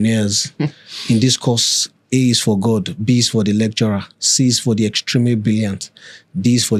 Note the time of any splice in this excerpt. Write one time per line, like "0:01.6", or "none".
none

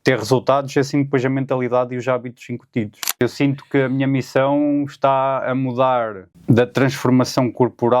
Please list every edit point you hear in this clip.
0:03.2
0:06.3

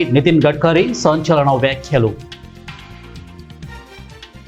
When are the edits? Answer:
none

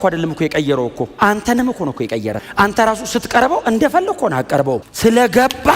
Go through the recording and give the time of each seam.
0:02.4
0:04.9

